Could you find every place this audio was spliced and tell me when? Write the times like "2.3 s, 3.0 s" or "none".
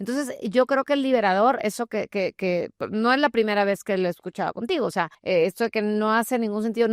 5.2 s